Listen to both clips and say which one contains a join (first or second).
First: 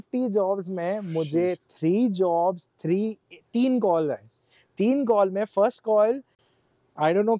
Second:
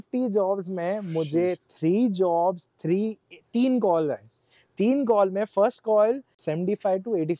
second